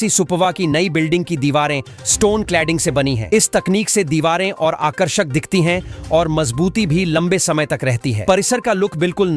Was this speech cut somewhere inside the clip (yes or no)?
no